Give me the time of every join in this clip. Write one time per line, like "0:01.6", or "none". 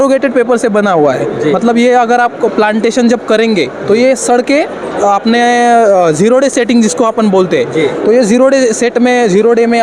none